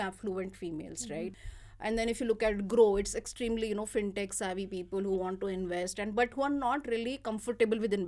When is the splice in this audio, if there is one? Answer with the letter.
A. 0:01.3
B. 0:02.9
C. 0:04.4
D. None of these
A